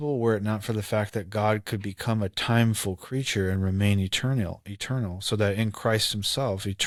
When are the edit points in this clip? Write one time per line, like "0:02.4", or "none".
none